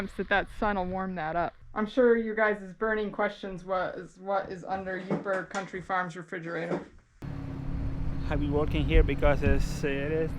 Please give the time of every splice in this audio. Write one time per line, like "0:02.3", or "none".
0:01.6
0:07.2